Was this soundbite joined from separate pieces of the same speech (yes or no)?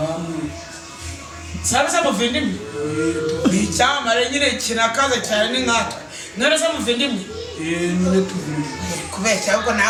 no